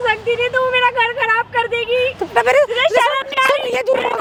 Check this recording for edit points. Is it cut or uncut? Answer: uncut